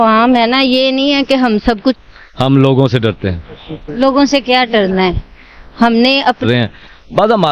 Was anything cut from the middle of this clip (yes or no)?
yes